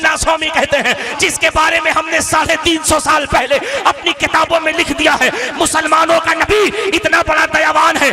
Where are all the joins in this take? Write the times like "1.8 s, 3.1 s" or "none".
1.1 s